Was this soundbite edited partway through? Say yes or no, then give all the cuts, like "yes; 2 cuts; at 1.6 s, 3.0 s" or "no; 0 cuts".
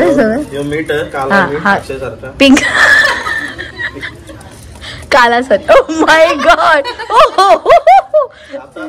no; 0 cuts